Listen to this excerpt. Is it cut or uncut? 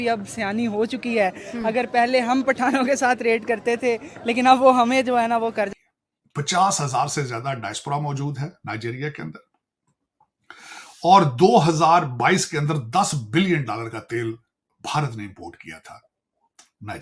cut